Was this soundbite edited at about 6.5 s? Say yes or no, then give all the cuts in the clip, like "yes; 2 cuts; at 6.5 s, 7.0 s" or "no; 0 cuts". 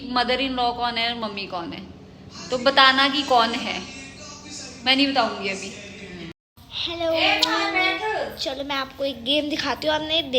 yes; 1 cut; at 6.5 s